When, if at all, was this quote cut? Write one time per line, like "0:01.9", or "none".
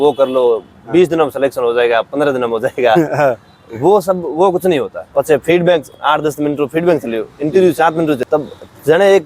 0:05.0
0:08.2

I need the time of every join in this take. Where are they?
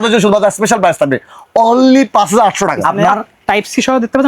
0:02.8

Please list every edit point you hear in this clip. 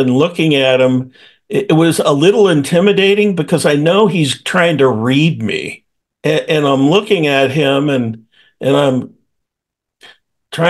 none

